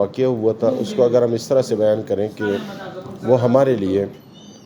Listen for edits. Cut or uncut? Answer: uncut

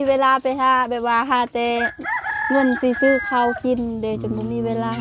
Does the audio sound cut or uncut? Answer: uncut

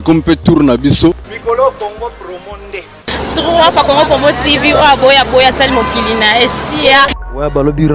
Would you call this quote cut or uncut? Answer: cut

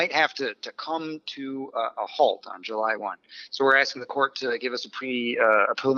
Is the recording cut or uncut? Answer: uncut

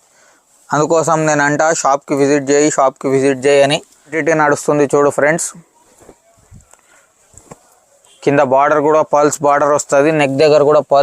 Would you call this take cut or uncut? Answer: cut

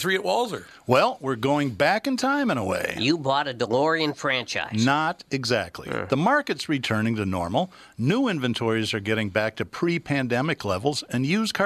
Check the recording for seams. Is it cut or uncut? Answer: uncut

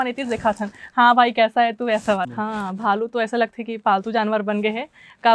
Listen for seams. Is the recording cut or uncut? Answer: cut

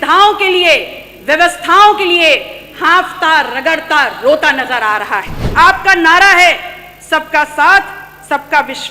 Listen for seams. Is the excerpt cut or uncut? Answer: cut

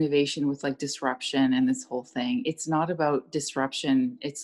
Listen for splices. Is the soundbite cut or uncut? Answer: uncut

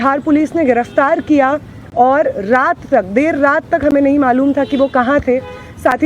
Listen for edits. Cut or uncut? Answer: uncut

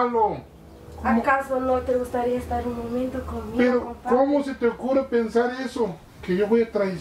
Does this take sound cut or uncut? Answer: uncut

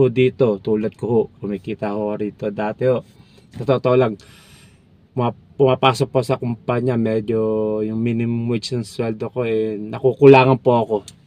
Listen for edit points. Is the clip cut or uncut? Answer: uncut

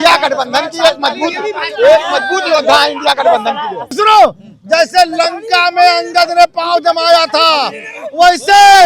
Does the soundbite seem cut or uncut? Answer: cut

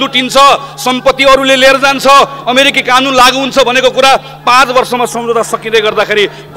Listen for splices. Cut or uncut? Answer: uncut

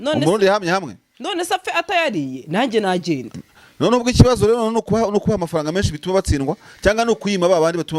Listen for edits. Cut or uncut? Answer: uncut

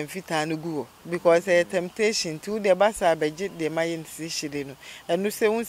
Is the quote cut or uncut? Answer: uncut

